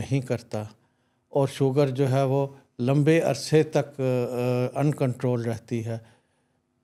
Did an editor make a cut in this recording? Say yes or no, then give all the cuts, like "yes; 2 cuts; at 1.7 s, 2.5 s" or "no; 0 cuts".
no; 0 cuts